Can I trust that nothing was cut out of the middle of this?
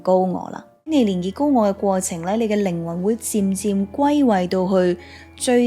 no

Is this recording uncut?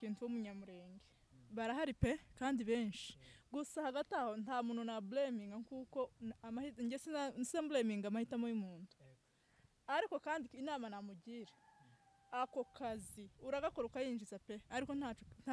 yes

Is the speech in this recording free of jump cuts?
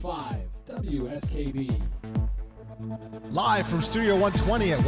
no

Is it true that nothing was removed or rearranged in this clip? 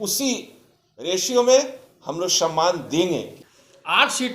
no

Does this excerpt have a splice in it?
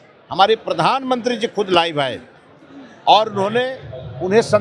no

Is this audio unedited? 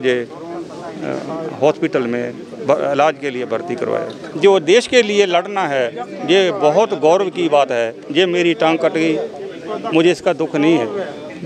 no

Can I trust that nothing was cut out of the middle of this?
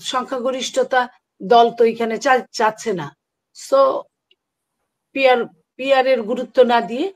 yes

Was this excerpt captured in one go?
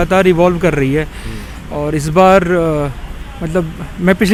yes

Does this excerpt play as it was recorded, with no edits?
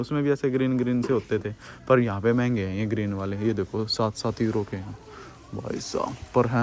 yes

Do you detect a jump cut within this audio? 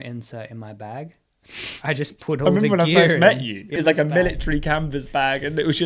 yes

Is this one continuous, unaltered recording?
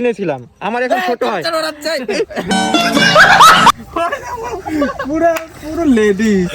no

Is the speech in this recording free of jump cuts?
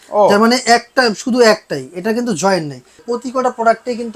no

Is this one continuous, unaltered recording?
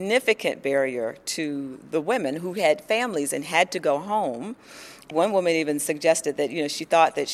no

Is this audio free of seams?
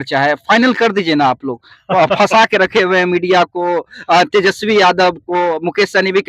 yes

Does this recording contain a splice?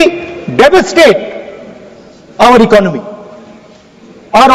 no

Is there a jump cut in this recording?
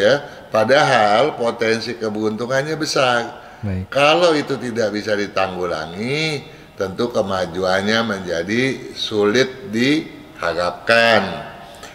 no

